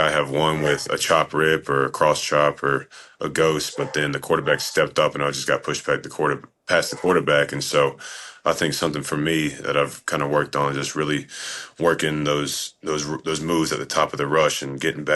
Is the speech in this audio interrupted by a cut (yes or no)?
no